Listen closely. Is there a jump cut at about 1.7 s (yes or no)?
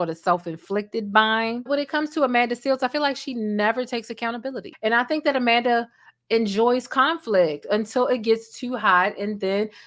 yes